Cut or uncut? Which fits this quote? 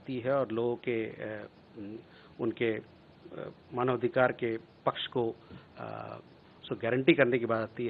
uncut